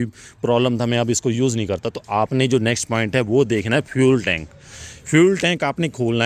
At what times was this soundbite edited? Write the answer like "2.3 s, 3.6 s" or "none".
none